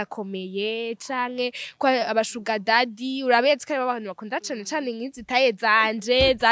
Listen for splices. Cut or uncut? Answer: uncut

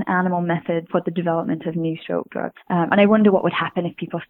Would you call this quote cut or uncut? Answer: cut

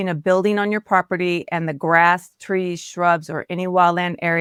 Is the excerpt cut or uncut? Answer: uncut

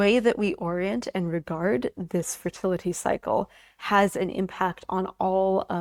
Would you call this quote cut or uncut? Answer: uncut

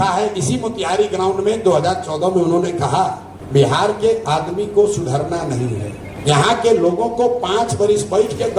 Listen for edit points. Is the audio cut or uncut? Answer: cut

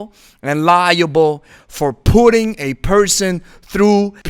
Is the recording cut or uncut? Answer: uncut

